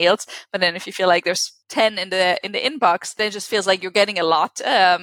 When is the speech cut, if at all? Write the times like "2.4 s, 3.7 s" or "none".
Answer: 1.5 s, 3.1 s